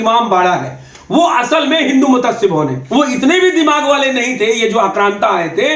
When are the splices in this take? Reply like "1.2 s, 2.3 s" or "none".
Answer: 2.8 s